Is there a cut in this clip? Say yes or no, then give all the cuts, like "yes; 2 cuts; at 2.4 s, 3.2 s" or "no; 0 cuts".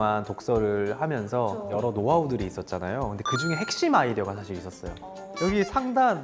yes; 2 cuts; at 1.7 s, 5.3 s